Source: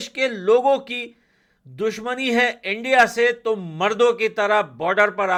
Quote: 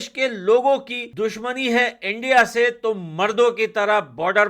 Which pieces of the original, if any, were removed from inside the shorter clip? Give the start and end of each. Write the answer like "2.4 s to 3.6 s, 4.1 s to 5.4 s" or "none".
1.0 s to 1.6 s